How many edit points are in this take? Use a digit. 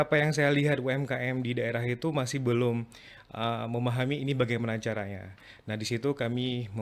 0